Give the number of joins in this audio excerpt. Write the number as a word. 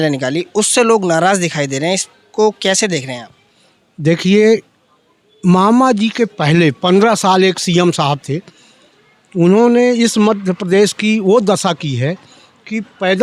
zero